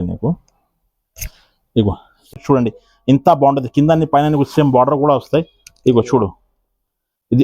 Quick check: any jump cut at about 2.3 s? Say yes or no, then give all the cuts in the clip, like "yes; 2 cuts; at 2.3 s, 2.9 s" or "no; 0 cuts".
yes; 1 cut; at 2.3 s